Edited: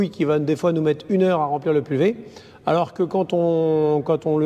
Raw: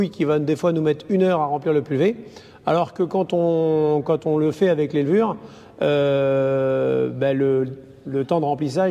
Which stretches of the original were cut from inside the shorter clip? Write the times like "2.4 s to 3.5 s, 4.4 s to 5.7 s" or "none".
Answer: none